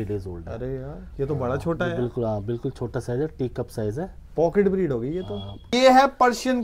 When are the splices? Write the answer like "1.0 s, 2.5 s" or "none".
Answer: 5.7 s